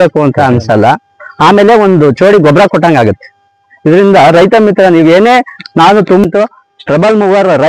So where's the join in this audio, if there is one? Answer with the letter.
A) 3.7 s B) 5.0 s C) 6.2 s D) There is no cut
C